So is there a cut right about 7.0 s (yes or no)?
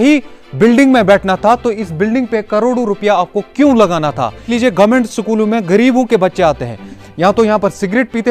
yes